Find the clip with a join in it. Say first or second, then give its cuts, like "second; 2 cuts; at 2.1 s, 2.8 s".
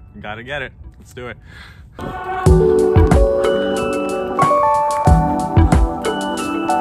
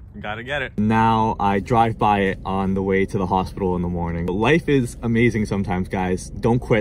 second; 2 cuts; at 0.8 s, 4.3 s